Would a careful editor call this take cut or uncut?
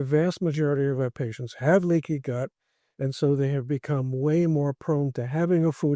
uncut